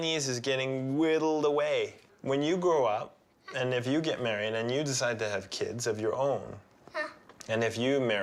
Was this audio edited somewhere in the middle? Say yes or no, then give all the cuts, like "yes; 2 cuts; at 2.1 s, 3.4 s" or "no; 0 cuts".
no; 0 cuts